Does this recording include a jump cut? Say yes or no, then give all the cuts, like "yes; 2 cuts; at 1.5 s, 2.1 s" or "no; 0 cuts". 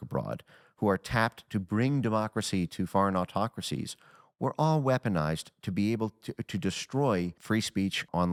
no; 0 cuts